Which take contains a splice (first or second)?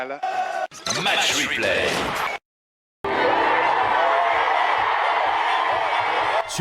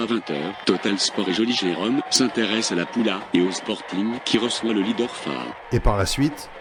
first